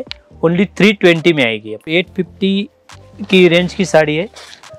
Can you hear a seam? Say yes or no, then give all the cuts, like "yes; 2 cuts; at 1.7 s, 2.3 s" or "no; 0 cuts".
yes; 1 cut; at 1.9 s